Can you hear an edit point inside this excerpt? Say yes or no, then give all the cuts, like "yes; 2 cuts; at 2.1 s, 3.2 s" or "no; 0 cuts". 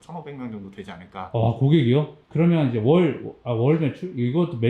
yes; 1 cut; at 2.2 s